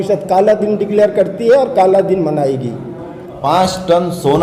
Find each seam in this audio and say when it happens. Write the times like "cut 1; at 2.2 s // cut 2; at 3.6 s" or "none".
cut 1; at 3.4 s

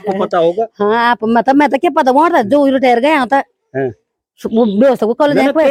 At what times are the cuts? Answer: none

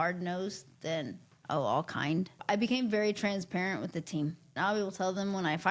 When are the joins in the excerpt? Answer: cut 1; at 2.4 s // cut 2; at 4.5 s

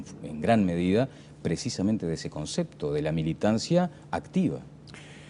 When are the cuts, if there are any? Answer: cut 1; at 2.1 s

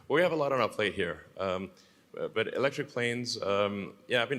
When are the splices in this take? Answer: none

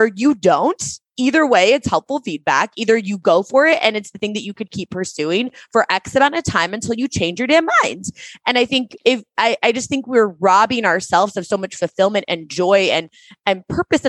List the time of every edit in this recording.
none

